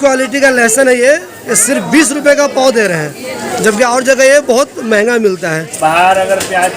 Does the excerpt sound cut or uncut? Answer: cut